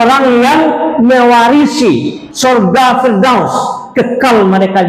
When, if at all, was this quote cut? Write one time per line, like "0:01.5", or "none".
0:02.2